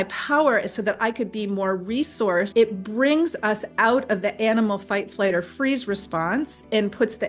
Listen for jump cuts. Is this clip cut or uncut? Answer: cut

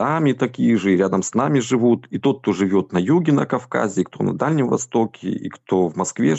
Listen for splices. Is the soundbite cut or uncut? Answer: uncut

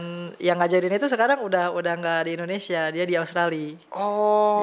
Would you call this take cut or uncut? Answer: uncut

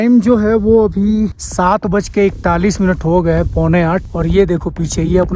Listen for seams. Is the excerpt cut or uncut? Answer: cut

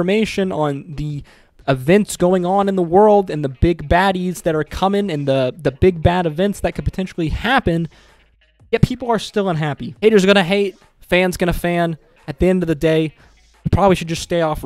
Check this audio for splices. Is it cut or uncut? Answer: uncut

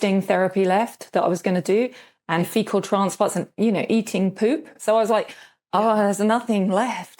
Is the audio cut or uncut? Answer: cut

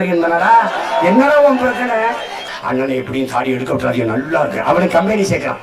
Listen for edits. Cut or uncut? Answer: cut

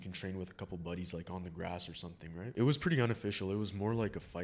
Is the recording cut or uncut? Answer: cut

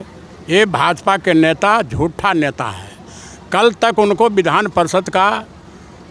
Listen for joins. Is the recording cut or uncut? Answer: uncut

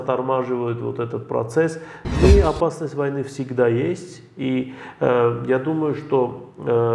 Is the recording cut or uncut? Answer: cut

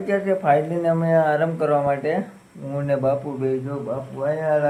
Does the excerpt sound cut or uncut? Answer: uncut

